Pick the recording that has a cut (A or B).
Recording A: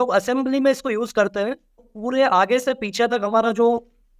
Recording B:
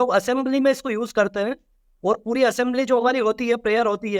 A